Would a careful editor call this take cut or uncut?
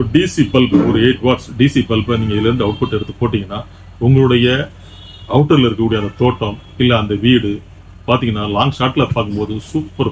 uncut